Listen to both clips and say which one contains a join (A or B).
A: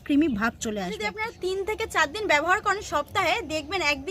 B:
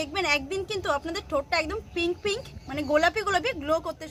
A